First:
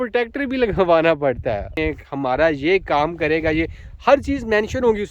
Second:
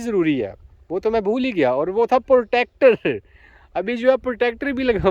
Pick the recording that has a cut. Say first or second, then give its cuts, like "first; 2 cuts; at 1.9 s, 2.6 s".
first; 1 cut; at 1.8 s